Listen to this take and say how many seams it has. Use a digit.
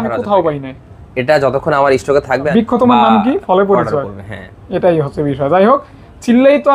1